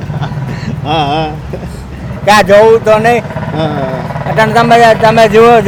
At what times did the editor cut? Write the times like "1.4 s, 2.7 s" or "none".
none